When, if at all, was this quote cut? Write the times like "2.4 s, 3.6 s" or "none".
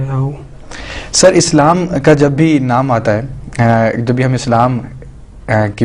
2.9 s